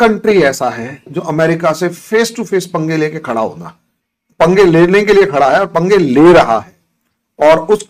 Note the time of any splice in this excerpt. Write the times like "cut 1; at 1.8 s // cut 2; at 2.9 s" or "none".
none